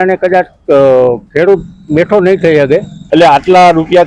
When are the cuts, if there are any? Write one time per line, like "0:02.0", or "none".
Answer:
0:03.0

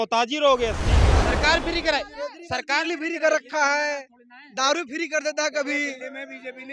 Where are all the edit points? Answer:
0:01.1

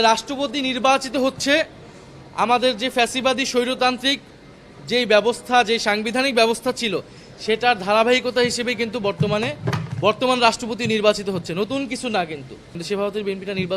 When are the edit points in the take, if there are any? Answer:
0:12.7

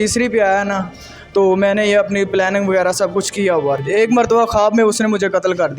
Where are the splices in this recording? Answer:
0:03.8

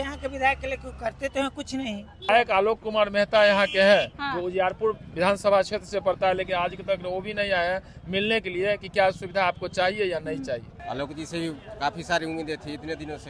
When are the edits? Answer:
0:02.3
0:10.7

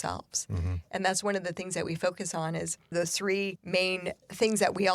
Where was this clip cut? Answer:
0:02.9

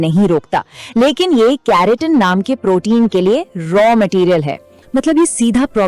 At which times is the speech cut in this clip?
0:04.7

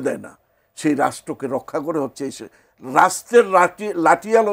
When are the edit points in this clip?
none

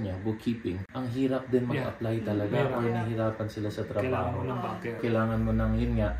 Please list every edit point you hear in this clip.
0:00.9
0:05.0

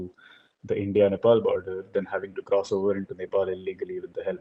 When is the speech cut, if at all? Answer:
none

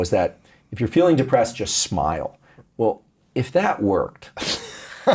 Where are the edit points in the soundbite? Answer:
none

